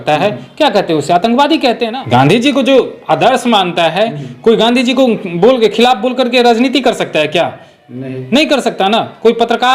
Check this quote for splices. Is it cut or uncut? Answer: cut